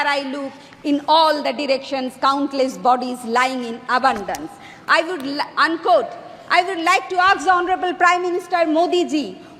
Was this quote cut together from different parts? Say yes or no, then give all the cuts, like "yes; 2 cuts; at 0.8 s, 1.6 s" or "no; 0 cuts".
no; 0 cuts